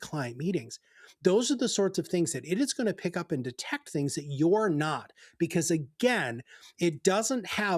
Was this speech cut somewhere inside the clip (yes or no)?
no